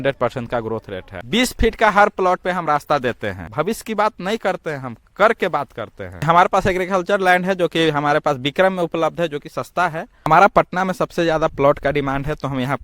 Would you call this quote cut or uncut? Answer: cut